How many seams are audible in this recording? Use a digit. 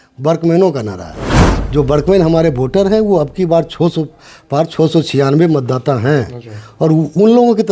0